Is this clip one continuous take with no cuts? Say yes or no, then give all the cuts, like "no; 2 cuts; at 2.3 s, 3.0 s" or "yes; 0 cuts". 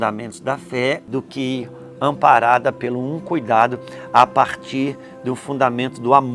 no; 1 cut; at 1.0 s